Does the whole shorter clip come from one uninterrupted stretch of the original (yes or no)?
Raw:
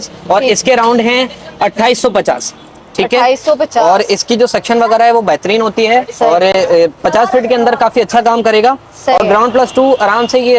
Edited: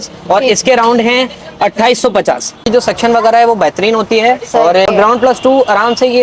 no